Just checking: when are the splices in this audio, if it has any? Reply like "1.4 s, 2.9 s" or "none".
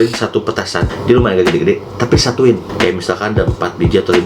0.9 s, 2.7 s